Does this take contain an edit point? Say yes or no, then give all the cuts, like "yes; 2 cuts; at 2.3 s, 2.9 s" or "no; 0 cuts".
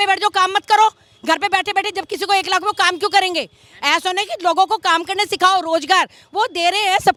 no; 0 cuts